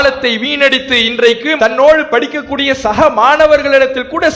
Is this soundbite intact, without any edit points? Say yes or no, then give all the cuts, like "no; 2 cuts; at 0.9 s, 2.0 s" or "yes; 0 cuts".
yes; 0 cuts